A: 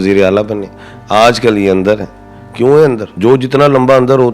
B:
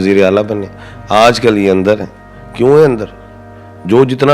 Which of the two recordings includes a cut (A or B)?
A